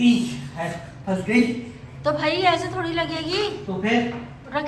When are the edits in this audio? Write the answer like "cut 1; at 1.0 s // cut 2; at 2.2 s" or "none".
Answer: none